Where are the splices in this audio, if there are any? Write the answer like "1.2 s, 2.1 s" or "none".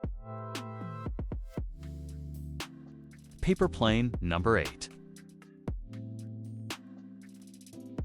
3.4 s, 4.8 s